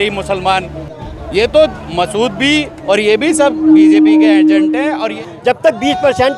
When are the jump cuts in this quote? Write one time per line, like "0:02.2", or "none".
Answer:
0:05.2